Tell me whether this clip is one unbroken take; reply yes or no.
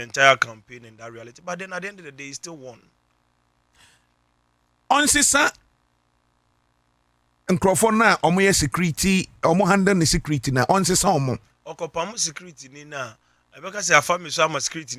yes